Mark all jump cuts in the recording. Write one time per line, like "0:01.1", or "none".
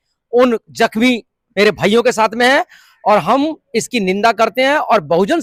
none